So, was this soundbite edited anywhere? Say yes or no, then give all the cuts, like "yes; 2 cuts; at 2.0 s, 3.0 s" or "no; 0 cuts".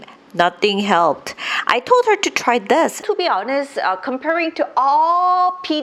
yes; 1 cut; at 3.0 s